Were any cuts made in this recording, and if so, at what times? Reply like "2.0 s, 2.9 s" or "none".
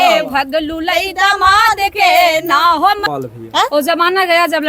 3.0 s

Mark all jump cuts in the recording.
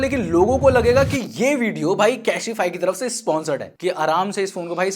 3.7 s

